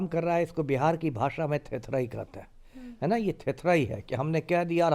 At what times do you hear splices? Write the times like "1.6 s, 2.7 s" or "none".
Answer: none